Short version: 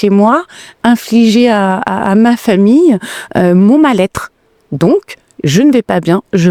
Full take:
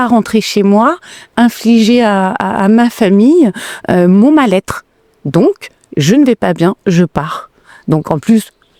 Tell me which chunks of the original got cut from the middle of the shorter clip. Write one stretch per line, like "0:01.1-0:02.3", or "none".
none